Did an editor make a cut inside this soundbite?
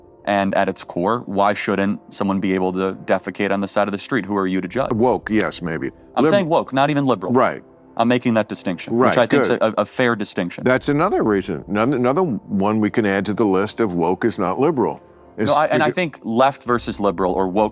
yes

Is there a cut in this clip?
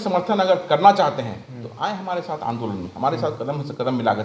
no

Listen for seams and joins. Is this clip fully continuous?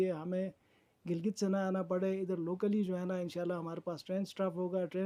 yes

